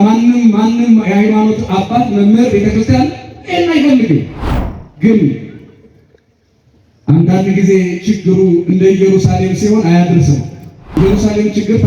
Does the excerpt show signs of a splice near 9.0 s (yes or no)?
no